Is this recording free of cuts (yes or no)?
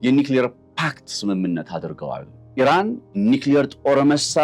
no